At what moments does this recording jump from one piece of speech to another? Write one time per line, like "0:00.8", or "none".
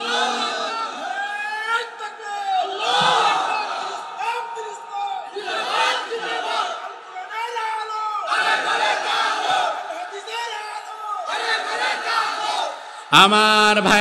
none

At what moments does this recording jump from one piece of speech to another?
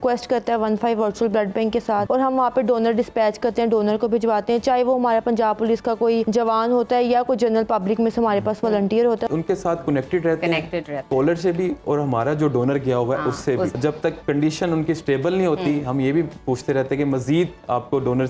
0:02.1
0:06.3
0:09.3
0:13.7

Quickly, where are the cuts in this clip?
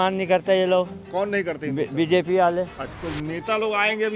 0:02.9

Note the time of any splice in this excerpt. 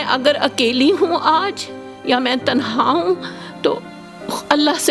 none

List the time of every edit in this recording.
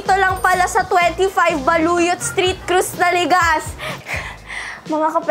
0:03.8

